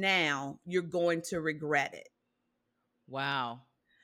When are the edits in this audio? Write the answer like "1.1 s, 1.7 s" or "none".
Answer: none